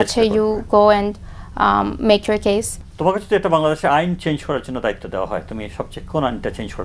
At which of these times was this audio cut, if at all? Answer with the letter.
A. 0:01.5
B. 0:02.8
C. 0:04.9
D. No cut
B